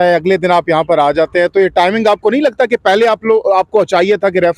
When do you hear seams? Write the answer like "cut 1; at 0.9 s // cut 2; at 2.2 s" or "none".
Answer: none